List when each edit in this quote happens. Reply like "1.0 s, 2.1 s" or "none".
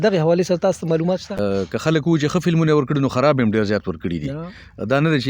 1.4 s